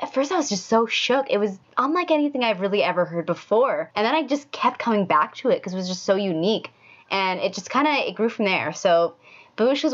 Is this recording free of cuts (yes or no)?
no